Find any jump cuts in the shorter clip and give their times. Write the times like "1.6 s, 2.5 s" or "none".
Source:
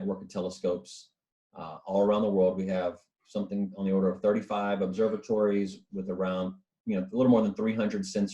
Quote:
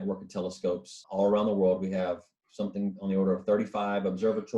1.0 s